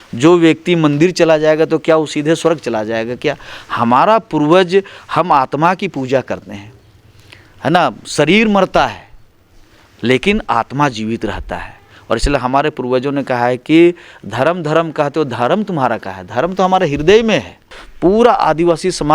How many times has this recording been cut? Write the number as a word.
one